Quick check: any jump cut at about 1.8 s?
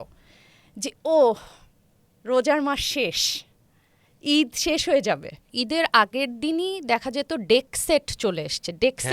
no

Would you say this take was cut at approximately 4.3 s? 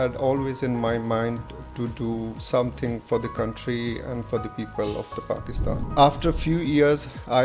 no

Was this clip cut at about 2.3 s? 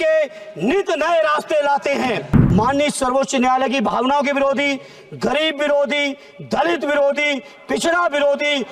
yes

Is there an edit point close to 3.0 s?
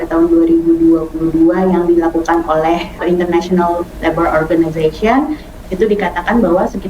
yes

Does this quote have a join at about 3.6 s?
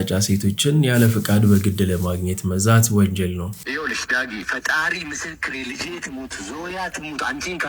yes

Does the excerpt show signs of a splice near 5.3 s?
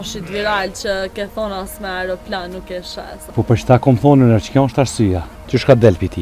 yes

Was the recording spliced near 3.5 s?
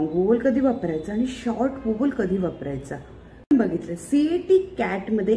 yes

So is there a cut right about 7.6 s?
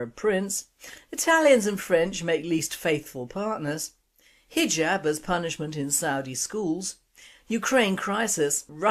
yes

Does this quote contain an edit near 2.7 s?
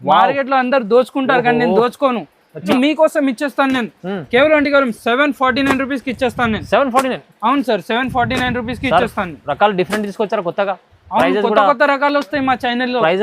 yes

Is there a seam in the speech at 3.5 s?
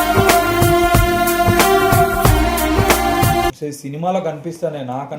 yes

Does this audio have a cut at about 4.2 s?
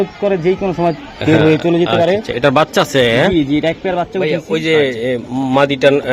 yes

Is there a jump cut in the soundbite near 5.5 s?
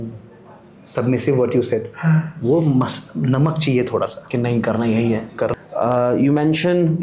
yes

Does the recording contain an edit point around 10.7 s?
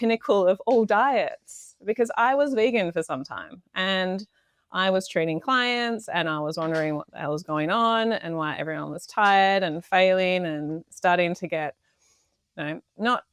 no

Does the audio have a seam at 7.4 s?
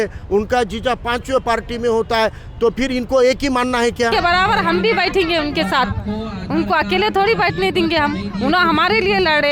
no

